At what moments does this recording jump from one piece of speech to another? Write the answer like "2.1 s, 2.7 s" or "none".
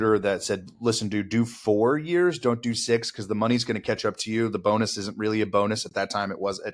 none